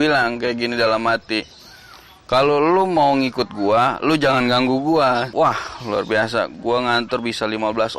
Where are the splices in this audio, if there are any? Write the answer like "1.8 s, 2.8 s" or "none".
5.3 s